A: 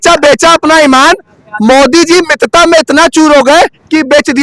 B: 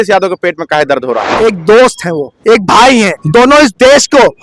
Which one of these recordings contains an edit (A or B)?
B